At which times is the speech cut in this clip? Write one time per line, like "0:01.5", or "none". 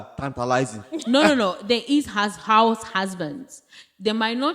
0:01.0